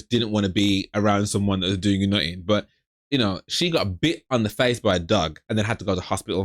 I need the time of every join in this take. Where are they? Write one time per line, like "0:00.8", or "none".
0:05.4